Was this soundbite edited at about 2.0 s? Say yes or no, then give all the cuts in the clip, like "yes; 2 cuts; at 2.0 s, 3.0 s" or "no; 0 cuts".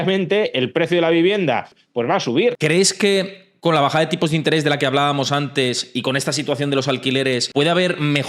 yes; 1 cut; at 2.0 s